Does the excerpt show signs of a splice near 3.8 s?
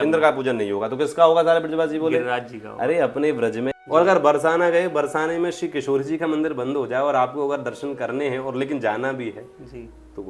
yes; 1 cut; at 3.8 s

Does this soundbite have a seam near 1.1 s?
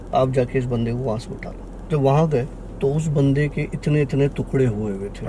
no; 1 cut; at 2.6 s

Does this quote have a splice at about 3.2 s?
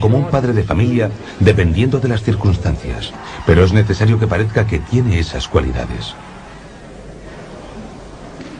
no; 0 cuts

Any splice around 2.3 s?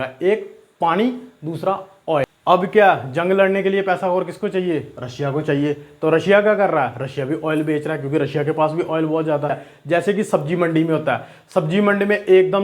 yes; 2 cuts; at 2.3 s, 9.7 s

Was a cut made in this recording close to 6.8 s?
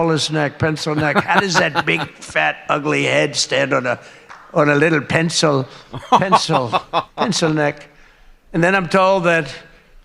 no; 0 cuts

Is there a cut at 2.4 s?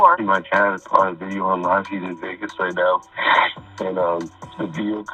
no; 1 cut; at 1.1 s

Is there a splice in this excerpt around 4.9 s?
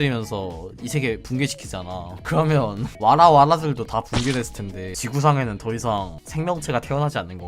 yes; 1 cut; at 4.9 s

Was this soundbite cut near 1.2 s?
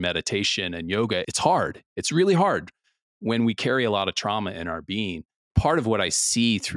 yes; 2 cuts; at 1.2 s, 5.5 s

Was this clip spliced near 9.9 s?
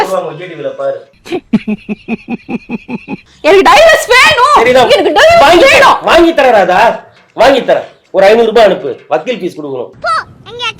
no; 1 cut; at 3.2 s

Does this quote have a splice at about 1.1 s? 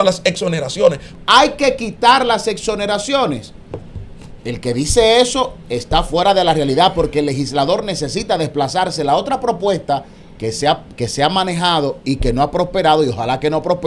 yes; 1 cut; at 1.1 s

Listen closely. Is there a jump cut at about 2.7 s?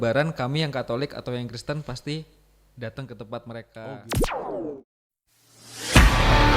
no; 1 cut; at 3.9 s

